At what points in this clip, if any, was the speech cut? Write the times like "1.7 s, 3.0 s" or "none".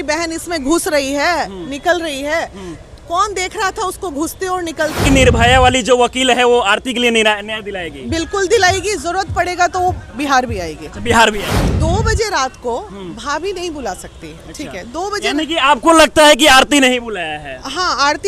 5.0 s, 11.7 s